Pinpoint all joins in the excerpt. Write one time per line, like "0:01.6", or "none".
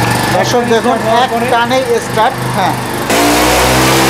0:03.1